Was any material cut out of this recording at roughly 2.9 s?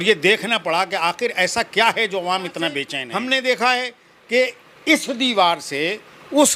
yes; 1 cut; at 2.9 s

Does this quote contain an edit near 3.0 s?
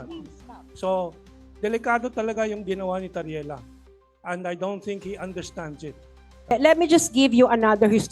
no; 1 cut; at 6.5 s

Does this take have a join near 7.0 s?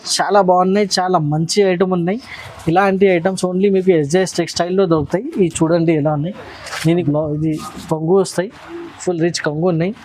yes; 1 cut; at 7.0 s

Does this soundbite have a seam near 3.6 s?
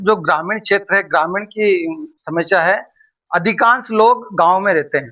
no; 0 cuts

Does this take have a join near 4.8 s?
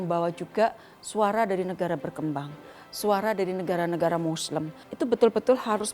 yes; 1 cut; at 4.8 s

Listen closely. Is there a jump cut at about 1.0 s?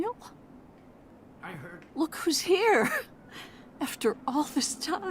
yes; 1 cut; at 1.0 s

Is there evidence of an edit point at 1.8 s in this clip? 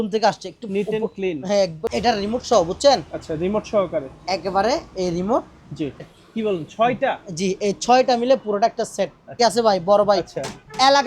yes; 3 cuts; at 1.8 s, 6.2 s, 9.4 s

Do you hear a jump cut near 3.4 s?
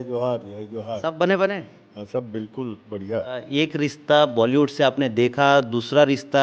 yes; 1 cut; at 3.4 s

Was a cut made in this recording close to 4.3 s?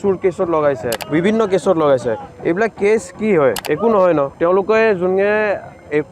yes; 3 cuts; at 1.0 s, 3.6 s, 4.3 s

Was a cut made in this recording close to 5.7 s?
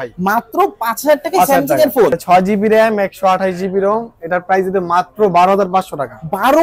no; 1 cut; at 2.2 s

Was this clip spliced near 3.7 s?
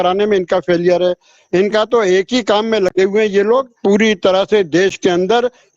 yes; 1 cut; at 3.7 s

